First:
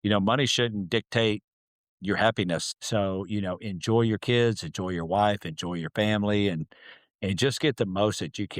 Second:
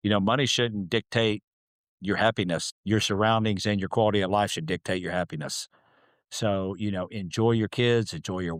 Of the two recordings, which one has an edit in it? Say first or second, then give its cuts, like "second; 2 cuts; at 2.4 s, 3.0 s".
first; 1 cut; at 2.7 s